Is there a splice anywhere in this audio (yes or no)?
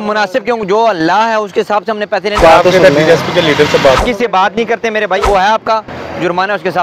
yes